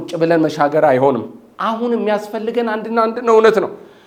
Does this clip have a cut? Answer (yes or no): no